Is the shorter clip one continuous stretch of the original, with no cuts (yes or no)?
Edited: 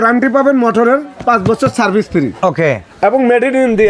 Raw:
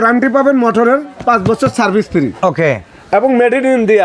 no